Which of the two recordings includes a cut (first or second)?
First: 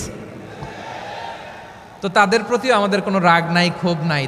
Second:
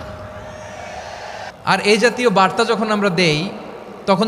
second